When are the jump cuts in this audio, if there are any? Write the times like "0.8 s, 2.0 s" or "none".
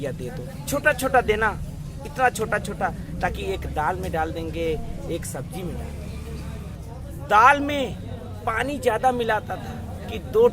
6.8 s